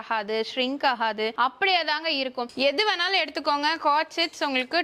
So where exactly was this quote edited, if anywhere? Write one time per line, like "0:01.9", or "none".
0:01.3
0:02.5